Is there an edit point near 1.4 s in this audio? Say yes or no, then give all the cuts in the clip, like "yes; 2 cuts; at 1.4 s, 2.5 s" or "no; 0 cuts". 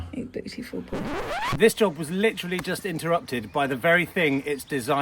yes; 1 cut; at 1.4 s